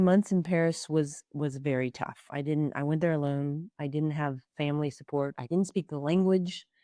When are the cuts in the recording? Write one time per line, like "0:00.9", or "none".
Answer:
none